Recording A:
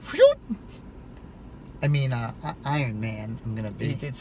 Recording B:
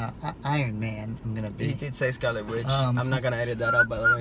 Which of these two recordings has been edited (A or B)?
B